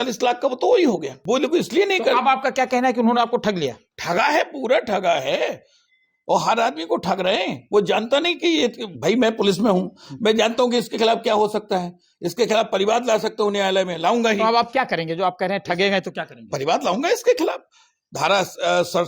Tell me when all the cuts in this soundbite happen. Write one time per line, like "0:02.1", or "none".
0:01.1